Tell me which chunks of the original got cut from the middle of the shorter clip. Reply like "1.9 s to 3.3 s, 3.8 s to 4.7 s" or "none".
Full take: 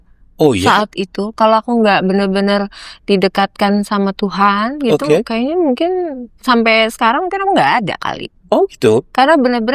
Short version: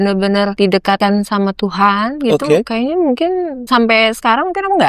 3.0 s to 3.5 s, 6.2 s to 6.3 s